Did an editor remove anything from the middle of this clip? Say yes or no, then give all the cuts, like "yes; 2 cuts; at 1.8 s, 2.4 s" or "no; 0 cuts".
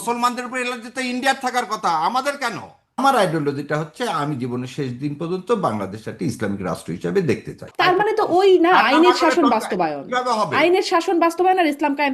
yes; 2 cuts; at 3.0 s, 7.7 s